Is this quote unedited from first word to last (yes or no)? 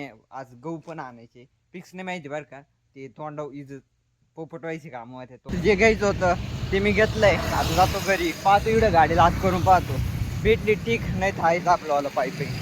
no